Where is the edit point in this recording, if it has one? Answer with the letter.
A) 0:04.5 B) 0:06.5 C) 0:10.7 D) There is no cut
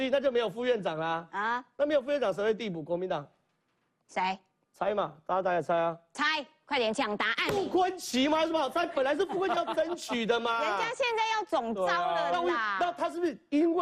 D